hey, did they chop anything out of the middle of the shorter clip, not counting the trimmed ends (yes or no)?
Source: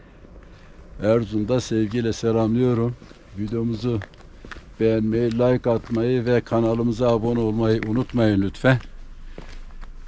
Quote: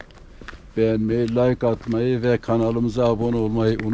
no